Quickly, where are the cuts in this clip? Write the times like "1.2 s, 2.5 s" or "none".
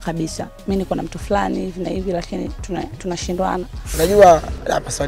3.8 s

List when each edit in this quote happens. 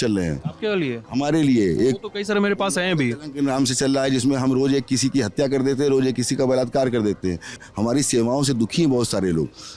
7.6 s

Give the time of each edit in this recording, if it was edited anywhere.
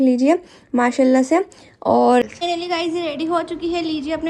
2.2 s

